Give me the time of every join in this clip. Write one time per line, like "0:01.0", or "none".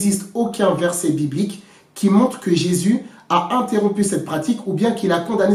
none